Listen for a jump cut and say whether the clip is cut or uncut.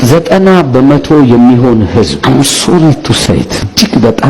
uncut